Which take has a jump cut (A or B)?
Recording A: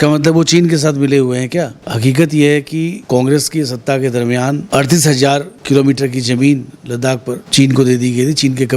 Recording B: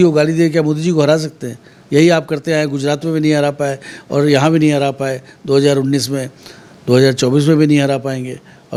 A